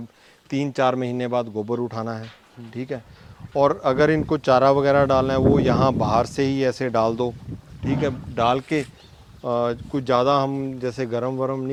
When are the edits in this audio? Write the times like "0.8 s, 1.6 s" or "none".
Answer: none